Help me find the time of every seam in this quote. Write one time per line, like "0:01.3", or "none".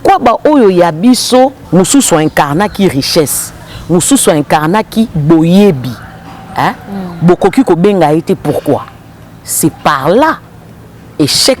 0:01.6